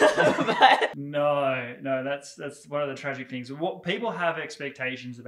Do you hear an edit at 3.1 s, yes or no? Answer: no